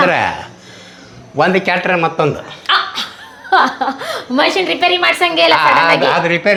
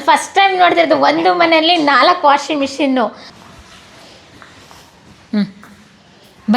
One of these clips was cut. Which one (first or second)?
second